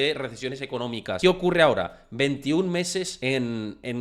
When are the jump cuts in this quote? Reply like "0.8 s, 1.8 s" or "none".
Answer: 1.2 s, 3.1 s